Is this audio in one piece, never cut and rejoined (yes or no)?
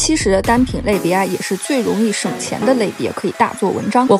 yes